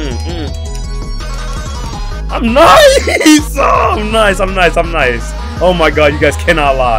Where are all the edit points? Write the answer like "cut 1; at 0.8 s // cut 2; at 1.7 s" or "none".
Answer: none